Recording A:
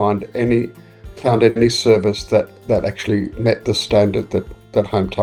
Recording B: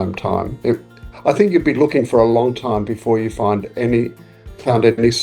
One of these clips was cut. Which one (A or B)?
B